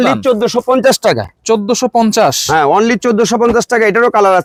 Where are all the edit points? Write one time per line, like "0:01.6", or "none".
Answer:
none